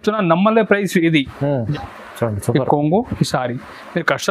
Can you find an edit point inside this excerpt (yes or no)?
yes